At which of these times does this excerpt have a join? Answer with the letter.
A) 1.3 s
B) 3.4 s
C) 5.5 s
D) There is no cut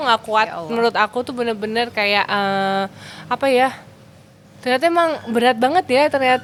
D